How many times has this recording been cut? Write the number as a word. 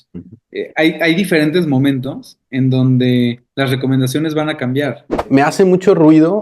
two